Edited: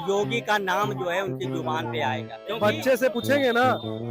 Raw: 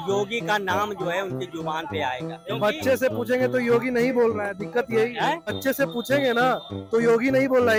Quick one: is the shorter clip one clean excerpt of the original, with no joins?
no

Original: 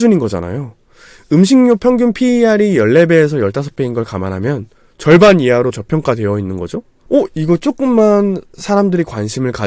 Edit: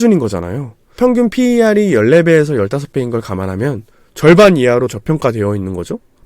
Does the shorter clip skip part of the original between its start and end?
yes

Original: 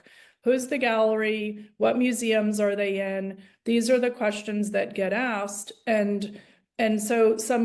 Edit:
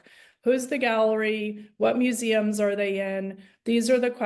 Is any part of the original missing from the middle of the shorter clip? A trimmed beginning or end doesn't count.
no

